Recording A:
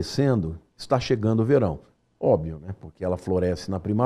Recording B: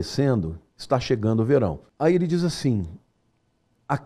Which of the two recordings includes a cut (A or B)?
B